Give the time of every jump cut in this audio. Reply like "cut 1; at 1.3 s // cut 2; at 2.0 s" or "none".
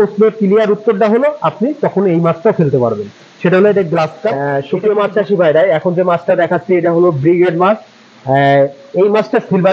cut 1; at 4.4 s